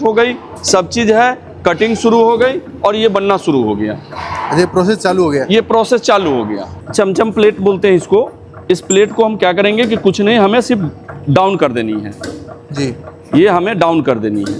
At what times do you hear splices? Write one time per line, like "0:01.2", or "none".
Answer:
0:06.7